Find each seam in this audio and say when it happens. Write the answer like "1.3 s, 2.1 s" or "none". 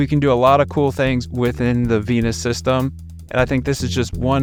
none